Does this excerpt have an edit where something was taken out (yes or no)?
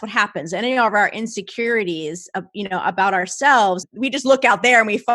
yes